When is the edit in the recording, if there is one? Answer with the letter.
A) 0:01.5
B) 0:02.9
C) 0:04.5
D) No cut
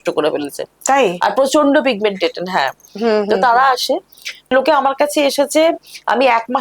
C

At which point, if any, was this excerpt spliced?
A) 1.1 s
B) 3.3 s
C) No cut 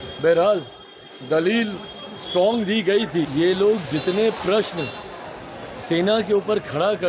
B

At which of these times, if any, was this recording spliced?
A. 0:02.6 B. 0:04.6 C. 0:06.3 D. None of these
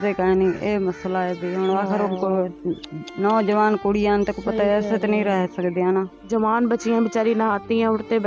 C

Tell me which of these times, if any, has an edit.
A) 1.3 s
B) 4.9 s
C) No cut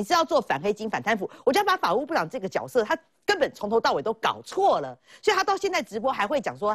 C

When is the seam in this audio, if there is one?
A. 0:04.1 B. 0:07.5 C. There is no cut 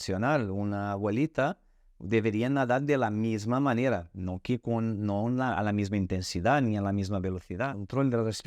B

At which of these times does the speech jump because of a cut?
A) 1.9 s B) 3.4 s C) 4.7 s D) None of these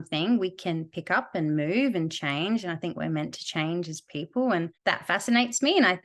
C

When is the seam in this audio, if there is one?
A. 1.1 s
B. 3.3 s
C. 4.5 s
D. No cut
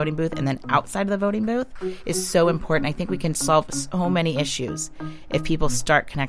D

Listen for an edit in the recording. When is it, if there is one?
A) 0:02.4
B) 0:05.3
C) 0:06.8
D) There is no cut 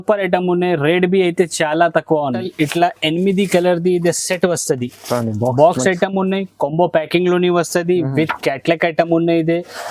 A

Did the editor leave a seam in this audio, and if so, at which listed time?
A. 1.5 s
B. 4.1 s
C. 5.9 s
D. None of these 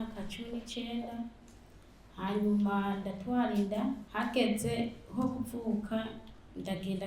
B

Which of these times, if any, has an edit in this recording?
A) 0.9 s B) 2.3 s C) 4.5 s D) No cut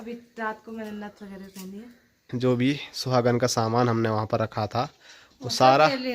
B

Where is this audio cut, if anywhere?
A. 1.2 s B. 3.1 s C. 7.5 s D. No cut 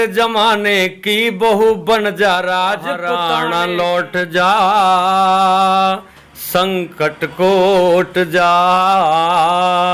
B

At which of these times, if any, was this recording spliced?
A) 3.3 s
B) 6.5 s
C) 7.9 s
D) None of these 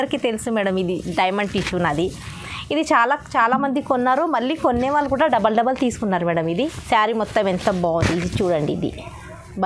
B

